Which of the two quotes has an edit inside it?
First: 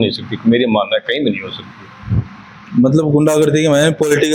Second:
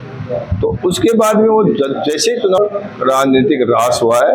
second; 1 cut; at 2.6 s

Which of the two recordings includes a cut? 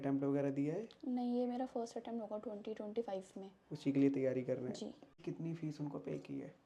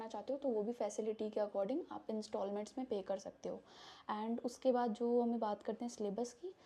first; 1 cut; at 5.1 s

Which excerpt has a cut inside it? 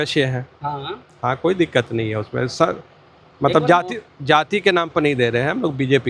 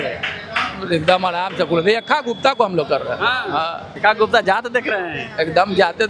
second; 1 cut; at 3.8 s

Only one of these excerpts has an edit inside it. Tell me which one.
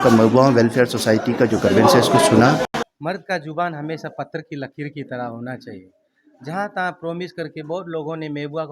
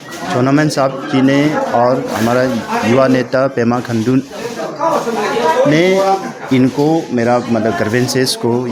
first; 1 cut; at 2.7 s

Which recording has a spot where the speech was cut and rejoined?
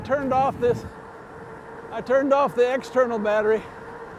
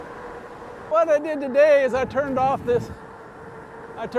second; 1 cut; at 0.9 s

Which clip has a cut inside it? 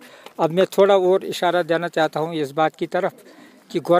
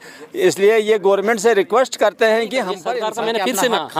second; 1 cut; at 2.9 s

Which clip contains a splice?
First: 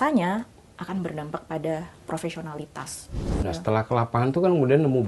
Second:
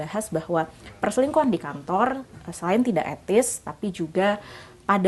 first; 1 cut; at 3.1 s

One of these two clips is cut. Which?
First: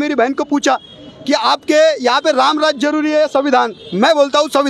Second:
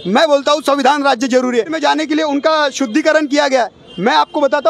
second; 1 cut; at 1.7 s

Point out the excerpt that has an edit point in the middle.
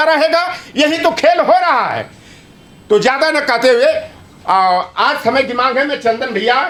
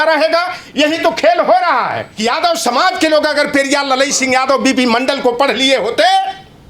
second; 1 cut; at 2.0 s

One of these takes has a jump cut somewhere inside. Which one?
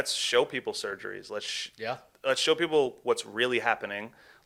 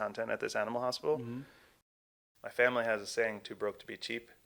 second; 1 cut; at 1.8 s

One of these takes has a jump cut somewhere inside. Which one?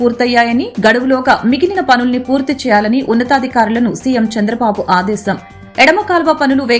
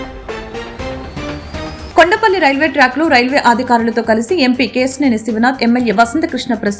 second; 1 cut; at 1.8 s

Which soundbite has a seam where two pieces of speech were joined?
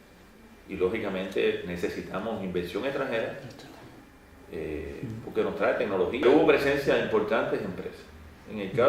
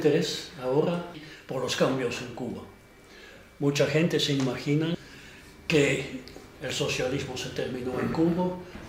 second; 1 cut; at 4.6 s

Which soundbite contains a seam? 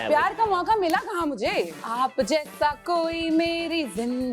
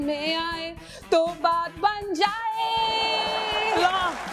first; 1 cut; at 1.7 s

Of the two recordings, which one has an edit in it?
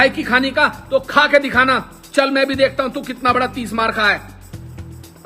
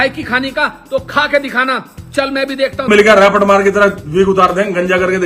second; 1 cut; at 2.9 s

